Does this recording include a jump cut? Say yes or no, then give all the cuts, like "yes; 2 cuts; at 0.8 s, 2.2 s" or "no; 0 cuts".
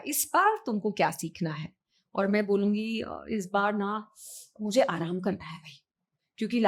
no; 0 cuts